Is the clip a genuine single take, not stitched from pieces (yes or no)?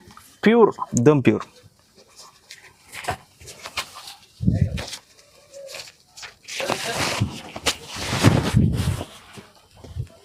yes